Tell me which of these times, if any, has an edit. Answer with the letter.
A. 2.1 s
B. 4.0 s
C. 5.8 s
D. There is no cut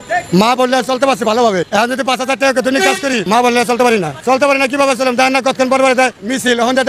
D